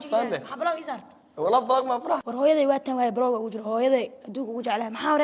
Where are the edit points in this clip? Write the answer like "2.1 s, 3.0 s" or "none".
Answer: 2.3 s